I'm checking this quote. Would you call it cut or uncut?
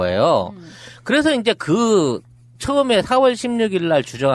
cut